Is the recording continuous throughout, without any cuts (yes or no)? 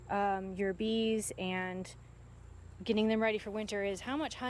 yes